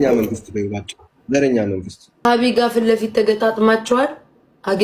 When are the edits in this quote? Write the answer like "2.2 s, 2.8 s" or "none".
2.3 s